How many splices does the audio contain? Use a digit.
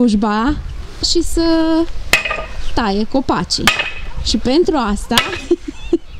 1